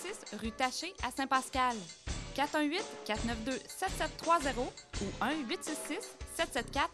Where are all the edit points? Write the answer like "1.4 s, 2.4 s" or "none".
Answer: none